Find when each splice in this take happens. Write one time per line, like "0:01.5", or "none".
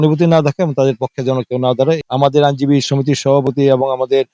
0:02.0